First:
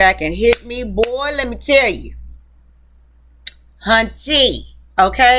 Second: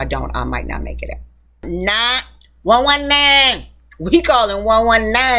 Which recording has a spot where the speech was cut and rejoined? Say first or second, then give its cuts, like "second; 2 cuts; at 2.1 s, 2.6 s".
second; 1 cut; at 1.7 s